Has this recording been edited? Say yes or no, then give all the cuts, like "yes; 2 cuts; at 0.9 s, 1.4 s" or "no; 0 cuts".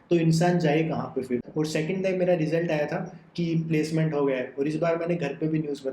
yes; 1 cut; at 1.5 s